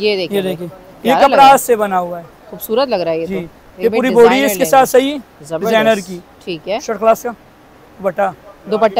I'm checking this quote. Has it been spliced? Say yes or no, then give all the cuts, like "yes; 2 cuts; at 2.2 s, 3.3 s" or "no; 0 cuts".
no; 0 cuts